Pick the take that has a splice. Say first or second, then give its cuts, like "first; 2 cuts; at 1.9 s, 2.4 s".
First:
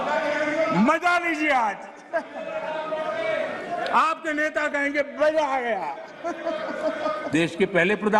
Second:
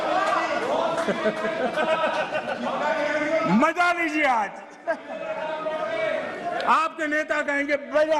first; 1 cut; at 7.2 s